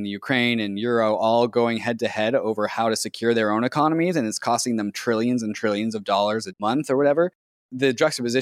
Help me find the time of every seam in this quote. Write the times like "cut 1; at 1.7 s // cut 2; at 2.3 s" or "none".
cut 1; at 6.6 s // cut 2; at 7.6 s